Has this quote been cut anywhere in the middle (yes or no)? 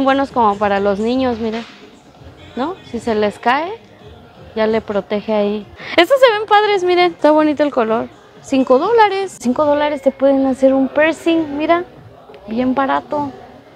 yes